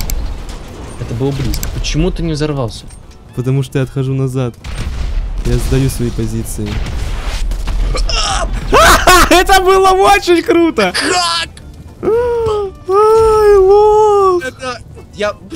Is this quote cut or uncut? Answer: uncut